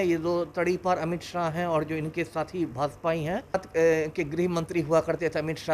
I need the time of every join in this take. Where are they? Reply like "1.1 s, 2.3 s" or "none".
3.5 s